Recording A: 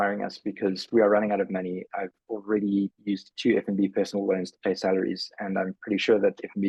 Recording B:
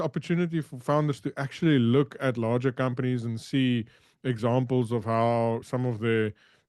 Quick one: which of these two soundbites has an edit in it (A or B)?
B